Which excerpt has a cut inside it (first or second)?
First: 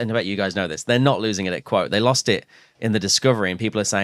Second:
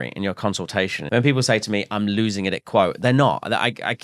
second